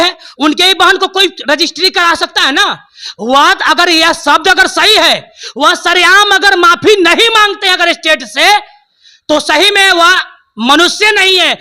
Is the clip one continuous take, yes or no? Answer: yes